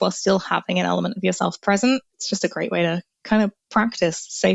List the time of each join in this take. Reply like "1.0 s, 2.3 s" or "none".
2.1 s